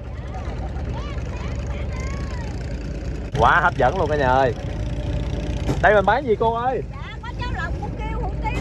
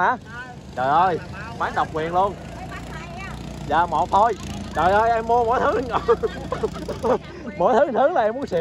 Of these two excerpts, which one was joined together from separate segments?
first; 1 cut; at 3.3 s

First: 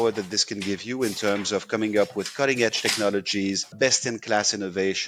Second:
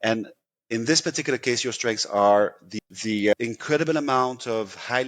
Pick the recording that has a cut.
second; 1 cut; at 2.6 s

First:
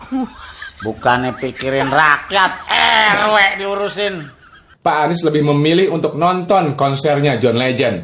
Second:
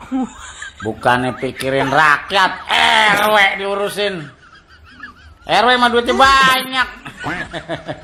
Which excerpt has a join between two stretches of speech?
first; 1 cut; at 4.7 s

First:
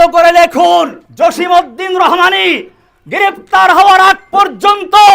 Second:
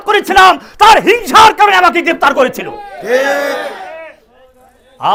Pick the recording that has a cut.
first; 1 cut; at 1.0 s

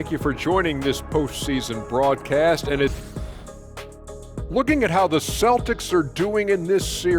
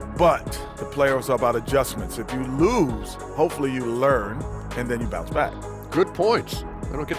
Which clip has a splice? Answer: first; 1 cut; at 3.0 s

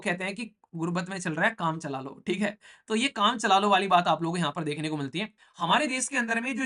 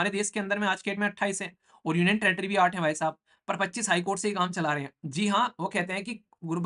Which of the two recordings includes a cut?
first; 1 cut; at 5.4 s

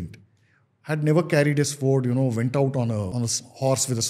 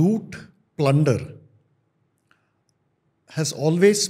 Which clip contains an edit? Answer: first; 1 cut; at 3.1 s

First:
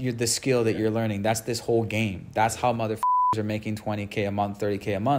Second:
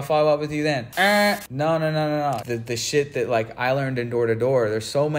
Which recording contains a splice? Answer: second; 2 cuts; at 1.1 s, 2.4 s

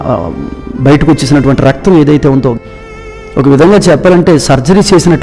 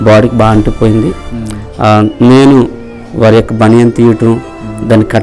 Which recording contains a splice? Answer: first; 1 cut; at 2.6 s

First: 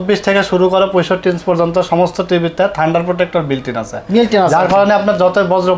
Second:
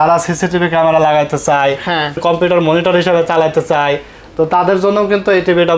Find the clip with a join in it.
second; 1 cut; at 2.2 s

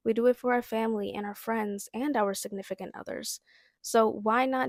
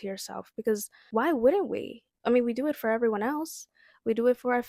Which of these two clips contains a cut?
second; 1 cut; at 0.9 s

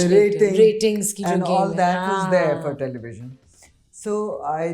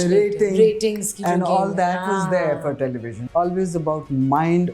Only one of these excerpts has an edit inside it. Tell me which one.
second; 1 cut; at 3.1 s

